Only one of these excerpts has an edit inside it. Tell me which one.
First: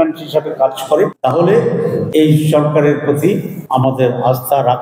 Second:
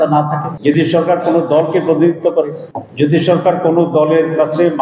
first; 3 cuts; at 1.2 s, 2.1 s, 3.5 s

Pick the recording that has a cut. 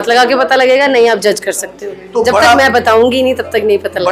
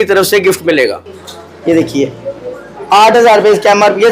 second; 1 cut; at 1.0 s

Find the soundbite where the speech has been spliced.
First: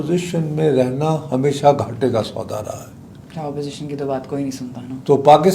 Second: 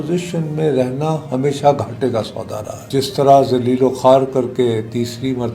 second; 1 cut; at 2.8 s

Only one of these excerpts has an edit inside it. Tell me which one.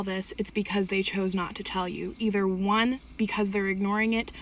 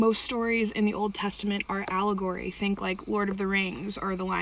second; 2 cuts; at 1.2 s, 2.8 s

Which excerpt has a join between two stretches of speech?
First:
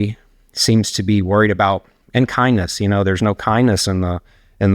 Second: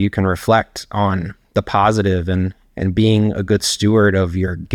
first; 1 cut; at 2.0 s

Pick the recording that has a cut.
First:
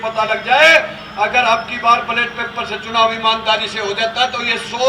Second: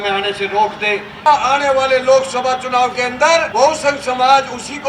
second; 2 cuts; at 1.2 s, 3.5 s

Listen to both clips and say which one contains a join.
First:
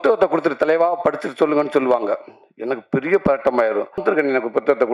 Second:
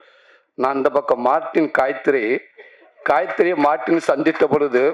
first; 1 cut; at 4.0 s

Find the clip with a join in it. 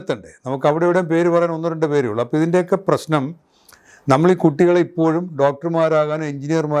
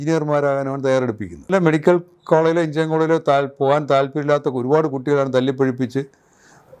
second; 1 cut; at 1.5 s

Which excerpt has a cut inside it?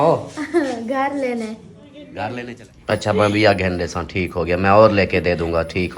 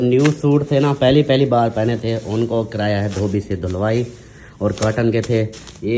first; 1 cut; at 2.3 s

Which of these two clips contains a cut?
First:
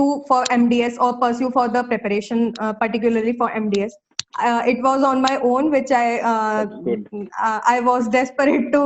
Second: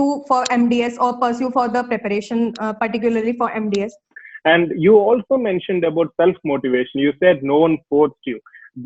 second; 1 cut; at 4.2 s

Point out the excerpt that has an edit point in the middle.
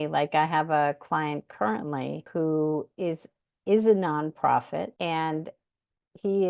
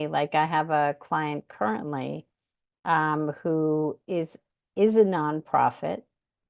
first; 2 cuts; at 2.3 s, 4.9 s

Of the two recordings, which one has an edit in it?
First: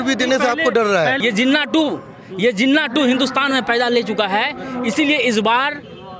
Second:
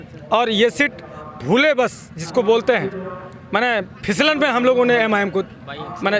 first; 1 cut; at 1.2 s

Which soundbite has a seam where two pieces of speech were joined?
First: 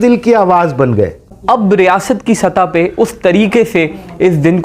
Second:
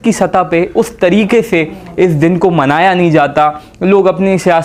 first; 1 cut; at 1.3 s

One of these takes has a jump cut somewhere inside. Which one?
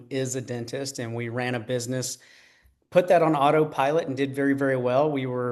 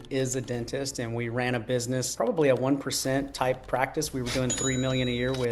second; 1 cut; at 2.1 s

